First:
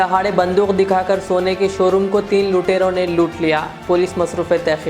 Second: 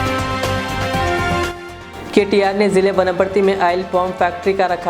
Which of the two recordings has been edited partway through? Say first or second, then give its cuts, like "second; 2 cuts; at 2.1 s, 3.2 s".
second; 1 cut; at 1.5 s